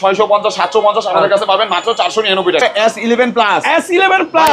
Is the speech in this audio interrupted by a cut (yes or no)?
yes